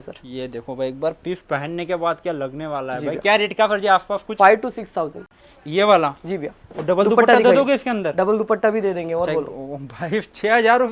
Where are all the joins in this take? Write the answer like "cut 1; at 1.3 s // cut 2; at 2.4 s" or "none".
none

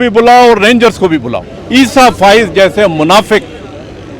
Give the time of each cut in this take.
cut 1; at 1.5 s

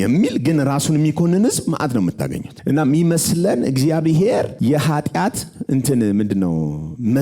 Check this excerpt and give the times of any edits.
cut 1; at 2.5 s // cut 2; at 4.5 s

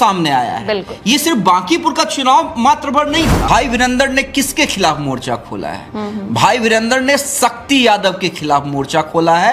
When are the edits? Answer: cut 1; at 3.4 s

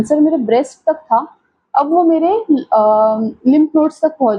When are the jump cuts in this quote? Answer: none

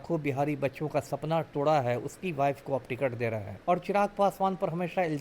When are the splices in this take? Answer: cut 1; at 3.5 s

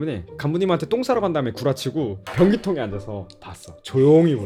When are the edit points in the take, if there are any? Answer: none

